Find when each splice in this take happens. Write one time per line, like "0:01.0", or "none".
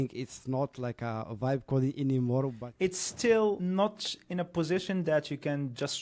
0:02.6